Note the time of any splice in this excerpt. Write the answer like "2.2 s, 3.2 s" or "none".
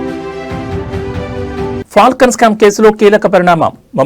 1.5 s